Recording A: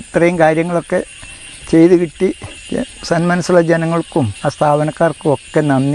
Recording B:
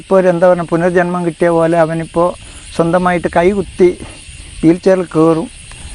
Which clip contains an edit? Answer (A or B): A